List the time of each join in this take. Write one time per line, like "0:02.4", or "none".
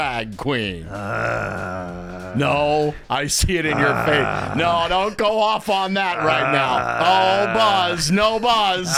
none